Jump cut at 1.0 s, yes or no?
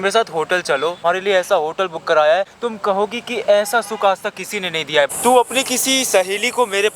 yes